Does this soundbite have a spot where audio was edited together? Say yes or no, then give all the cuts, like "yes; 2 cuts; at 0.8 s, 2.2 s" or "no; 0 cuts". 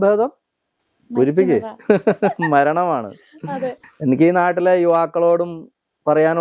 yes; 1 cut; at 3.8 s